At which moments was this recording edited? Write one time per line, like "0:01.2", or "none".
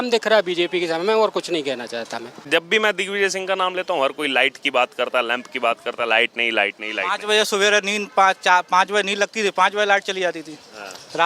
0:02.4